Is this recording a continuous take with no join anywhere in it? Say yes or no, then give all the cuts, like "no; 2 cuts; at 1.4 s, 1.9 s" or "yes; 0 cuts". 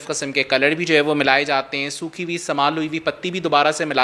yes; 0 cuts